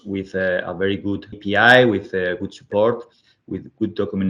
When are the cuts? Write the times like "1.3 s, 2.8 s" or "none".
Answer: 1.4 s